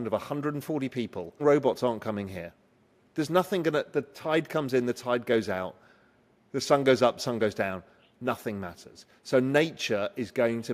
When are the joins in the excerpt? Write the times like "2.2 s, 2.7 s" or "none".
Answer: 1.4 s